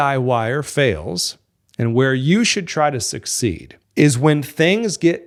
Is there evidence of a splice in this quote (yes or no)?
no